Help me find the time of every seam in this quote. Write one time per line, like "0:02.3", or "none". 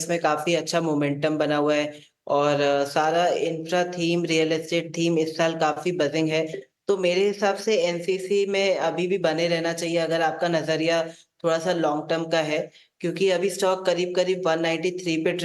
0:09.5